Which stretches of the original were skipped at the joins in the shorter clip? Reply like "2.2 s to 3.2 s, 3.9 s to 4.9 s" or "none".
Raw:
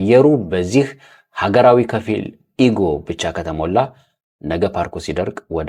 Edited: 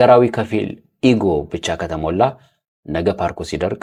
none